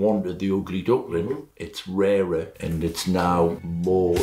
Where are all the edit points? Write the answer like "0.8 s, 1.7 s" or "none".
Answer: none